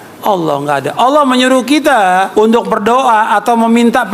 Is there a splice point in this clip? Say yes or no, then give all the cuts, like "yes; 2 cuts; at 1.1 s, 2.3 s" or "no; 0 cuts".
yes; 1 cut; at 2.3 s